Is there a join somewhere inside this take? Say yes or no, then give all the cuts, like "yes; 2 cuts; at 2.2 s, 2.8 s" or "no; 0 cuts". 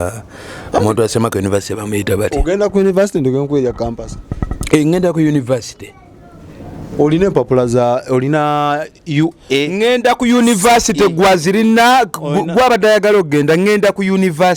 no; 0 cuts